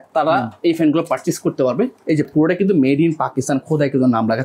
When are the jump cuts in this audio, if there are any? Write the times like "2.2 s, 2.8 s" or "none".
none